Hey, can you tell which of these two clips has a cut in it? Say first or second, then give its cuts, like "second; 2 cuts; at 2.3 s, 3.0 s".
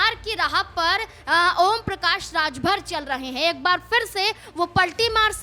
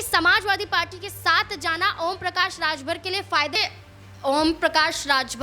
second; 1 cut; at 3.6 s